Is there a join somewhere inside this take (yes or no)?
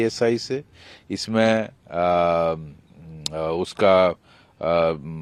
no